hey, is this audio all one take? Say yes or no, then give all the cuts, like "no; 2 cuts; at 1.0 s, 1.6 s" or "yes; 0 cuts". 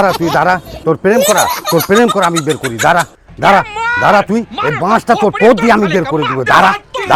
yes; 0 cuts